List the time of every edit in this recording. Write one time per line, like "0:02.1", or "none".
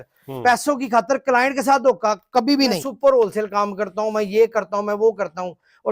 0:02.9